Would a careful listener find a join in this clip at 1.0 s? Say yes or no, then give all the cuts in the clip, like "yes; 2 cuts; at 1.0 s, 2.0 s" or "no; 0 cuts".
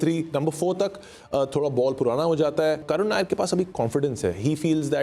no; 1 cut; at 2.8 s